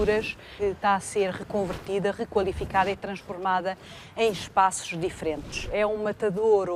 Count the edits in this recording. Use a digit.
1